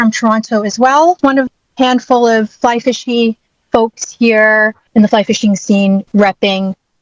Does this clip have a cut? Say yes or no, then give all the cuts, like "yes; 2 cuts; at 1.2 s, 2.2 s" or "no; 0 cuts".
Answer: yes; 2 cuts; at 1.2 s, 6.1 s